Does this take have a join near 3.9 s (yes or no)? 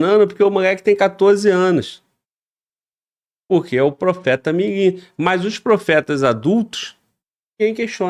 no